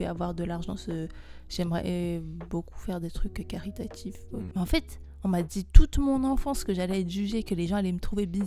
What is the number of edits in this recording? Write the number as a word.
one